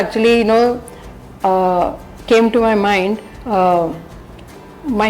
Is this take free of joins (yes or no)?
no